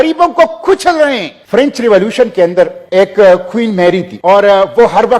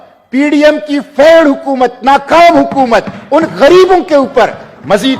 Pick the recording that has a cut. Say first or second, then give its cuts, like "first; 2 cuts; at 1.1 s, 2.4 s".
first; 3 cuts; at 1.3 s, 2.8 s, 4.1 s